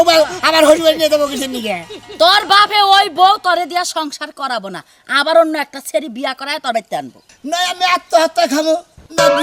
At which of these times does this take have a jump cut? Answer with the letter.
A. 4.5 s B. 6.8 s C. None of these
B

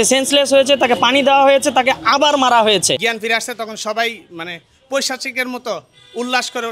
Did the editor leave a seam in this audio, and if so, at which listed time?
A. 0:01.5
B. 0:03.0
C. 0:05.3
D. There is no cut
B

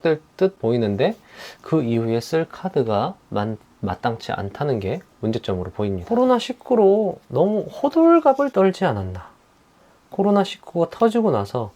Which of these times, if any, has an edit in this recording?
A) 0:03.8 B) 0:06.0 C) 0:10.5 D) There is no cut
B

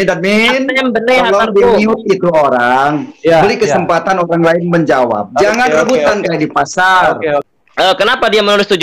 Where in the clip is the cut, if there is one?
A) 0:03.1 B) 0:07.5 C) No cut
B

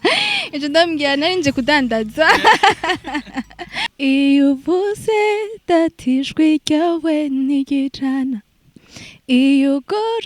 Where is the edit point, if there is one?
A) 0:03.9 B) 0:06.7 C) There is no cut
A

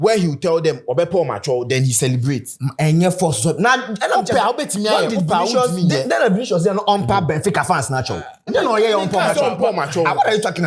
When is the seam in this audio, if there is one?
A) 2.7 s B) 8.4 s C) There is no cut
C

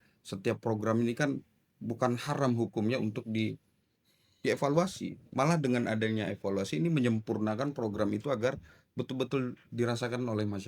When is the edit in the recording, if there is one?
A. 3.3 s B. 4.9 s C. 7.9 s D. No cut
D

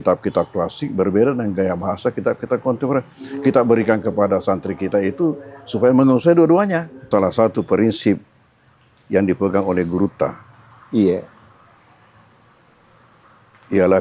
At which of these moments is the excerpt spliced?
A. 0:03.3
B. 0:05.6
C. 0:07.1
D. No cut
C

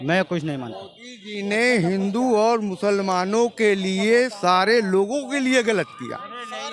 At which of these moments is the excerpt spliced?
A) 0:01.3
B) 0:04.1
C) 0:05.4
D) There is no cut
D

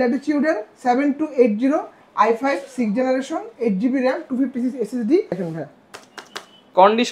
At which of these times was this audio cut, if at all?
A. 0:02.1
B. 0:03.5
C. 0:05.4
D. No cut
C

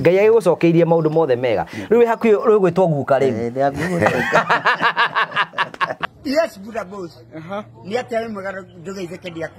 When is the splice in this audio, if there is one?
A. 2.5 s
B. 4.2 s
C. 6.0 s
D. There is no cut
C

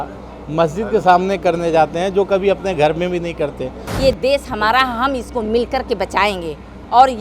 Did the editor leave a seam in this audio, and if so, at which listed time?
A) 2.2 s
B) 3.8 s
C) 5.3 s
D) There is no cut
B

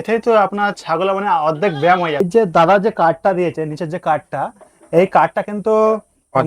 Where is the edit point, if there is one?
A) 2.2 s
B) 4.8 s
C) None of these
A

